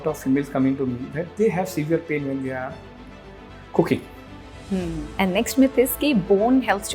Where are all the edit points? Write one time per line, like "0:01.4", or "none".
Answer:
0:05.0